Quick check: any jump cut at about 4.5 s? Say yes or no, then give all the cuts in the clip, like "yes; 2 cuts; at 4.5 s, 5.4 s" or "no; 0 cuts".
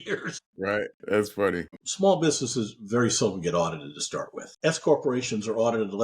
no; 1 cut; at 1.7 s